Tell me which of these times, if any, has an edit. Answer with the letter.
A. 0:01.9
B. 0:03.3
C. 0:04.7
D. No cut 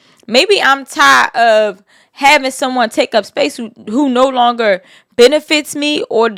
D